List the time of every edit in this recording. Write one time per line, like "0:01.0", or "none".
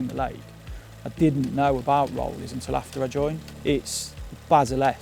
0:03.5

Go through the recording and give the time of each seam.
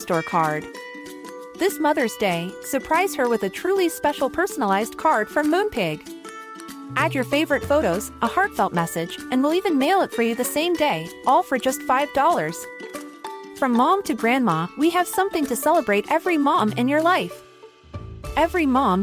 none

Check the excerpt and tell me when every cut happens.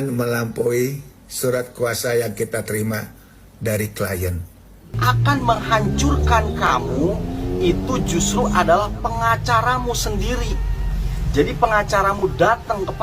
0:04.9

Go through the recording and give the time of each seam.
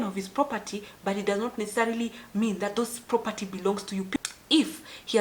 0:04.2

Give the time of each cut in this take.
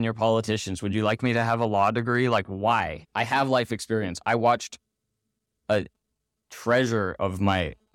0:03.0

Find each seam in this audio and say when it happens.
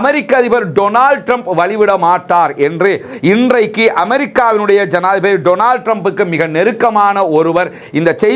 none

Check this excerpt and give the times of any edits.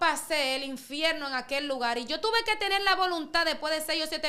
none

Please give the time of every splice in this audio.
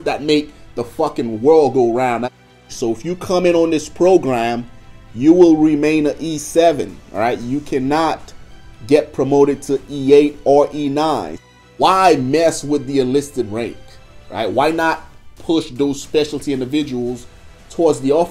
0:02.5
0:11.6

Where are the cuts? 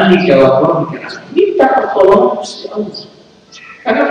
none

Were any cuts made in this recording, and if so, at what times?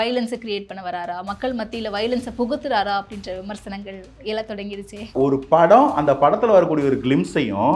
0:05.1

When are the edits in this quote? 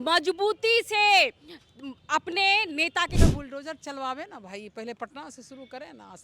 0:03.1

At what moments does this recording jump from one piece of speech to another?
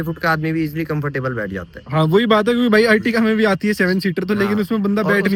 none

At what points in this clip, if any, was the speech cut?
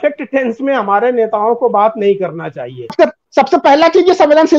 0:02.9

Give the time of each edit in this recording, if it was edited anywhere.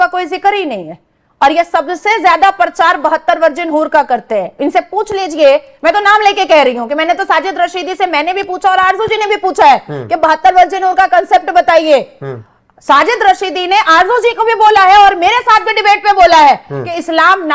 none

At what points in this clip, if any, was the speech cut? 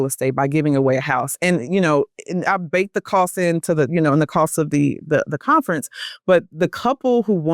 none

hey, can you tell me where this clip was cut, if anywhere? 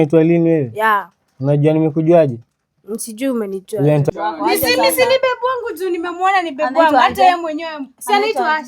0:04.1

